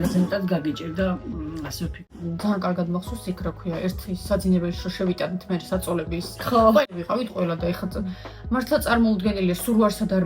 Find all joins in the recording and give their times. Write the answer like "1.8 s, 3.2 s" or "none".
2.2 s, 6.8 s